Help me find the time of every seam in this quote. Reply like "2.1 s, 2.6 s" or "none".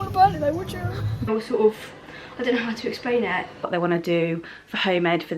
1.3 s, 3.7 s